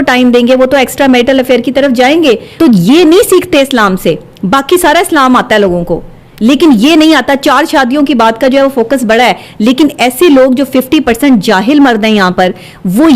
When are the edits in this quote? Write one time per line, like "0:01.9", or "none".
0:02.5

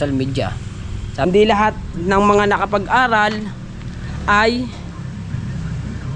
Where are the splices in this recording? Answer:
0:01.3

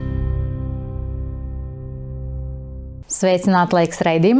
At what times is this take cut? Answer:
0:03.0

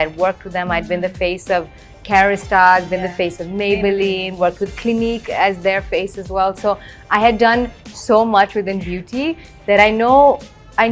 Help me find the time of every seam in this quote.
none

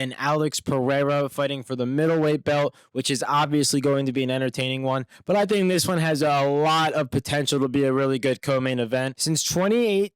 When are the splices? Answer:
0:09.1

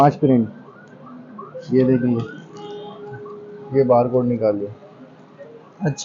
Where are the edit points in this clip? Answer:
none

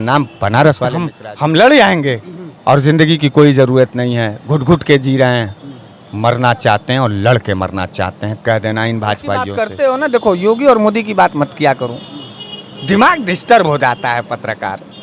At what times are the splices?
0:01.2
0:09.6

